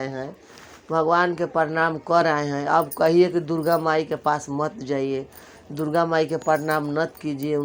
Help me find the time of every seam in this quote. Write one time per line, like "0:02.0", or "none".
none